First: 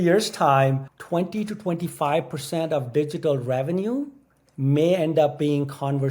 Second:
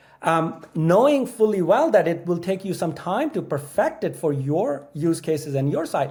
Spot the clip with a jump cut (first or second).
first